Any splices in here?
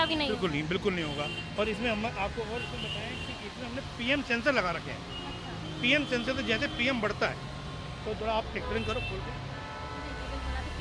no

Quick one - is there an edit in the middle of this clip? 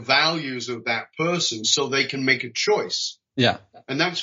no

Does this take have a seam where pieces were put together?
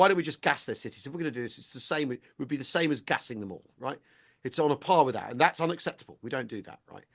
no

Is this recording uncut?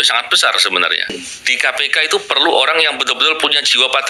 no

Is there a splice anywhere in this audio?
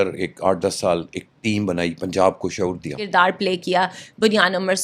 yes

